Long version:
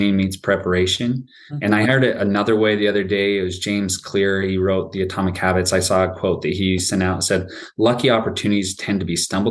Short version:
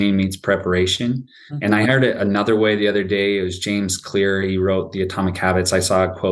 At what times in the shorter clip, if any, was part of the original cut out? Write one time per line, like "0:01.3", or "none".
none